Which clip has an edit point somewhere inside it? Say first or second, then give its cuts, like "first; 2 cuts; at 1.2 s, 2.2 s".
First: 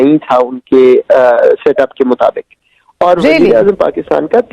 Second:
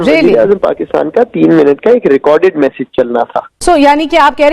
second; 1 cut; at 3.5 s